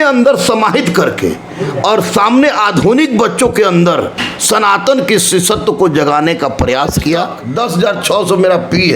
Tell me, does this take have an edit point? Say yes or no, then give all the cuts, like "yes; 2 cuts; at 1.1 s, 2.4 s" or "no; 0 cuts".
yes; 1 cut; at 7.4 s